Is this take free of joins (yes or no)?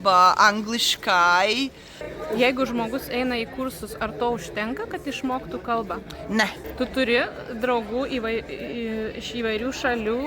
no